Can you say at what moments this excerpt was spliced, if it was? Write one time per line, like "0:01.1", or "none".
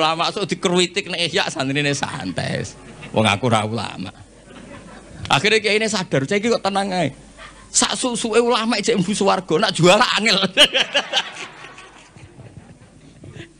0:09.4